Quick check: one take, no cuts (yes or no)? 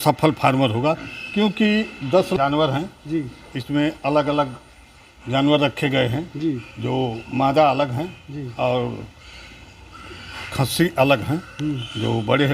no